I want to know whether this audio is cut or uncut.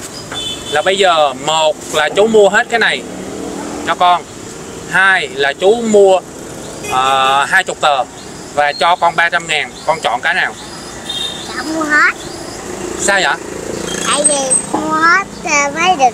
uncut